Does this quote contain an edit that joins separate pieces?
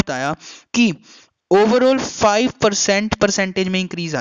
no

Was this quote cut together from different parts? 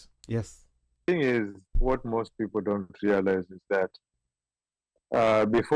yes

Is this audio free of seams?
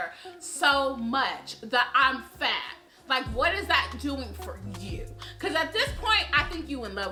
yes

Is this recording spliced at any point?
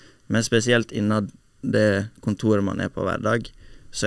no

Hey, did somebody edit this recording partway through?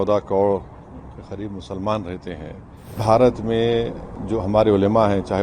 yes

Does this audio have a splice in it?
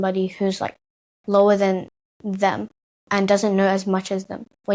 no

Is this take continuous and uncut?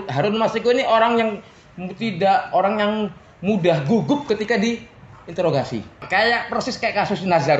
no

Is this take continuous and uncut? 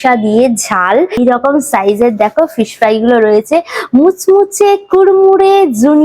no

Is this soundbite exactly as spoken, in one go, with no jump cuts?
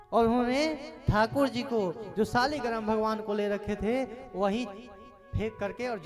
yes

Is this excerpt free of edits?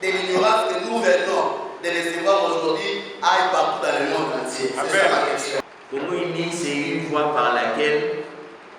no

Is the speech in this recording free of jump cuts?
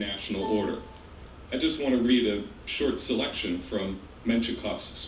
yes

